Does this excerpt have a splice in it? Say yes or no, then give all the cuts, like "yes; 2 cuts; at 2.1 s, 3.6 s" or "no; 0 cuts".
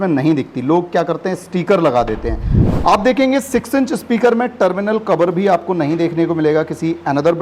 yes; 1 cut; at 2.6 s